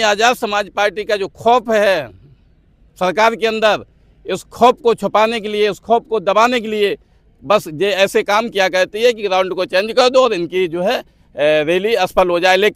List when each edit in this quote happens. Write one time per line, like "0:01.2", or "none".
none